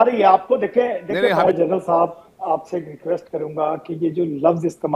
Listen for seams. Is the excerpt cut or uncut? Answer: cut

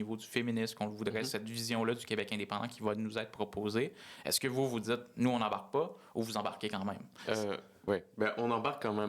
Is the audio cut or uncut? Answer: uncut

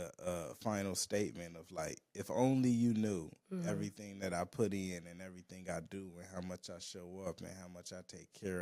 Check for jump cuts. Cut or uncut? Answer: uncut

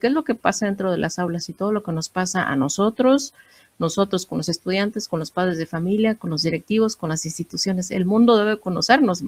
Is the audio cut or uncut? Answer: uncut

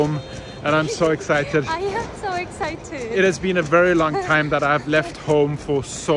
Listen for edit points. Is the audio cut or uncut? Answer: uncut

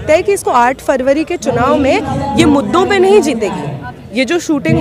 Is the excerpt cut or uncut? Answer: uncut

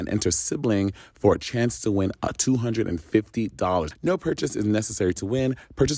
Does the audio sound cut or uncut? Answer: cut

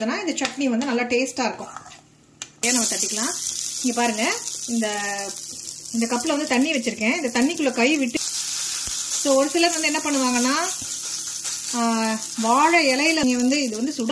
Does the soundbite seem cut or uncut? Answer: cut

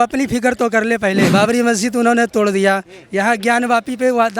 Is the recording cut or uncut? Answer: cut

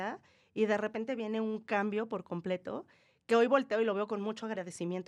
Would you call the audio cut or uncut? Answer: uncut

